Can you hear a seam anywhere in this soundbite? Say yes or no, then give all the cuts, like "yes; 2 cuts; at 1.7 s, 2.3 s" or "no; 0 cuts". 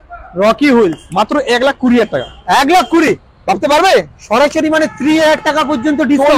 no; 0 cuts